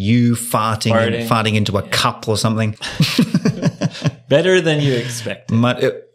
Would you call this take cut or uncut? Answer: cut